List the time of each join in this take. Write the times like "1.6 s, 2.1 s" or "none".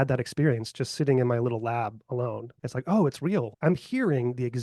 2.5 s, 3.5 s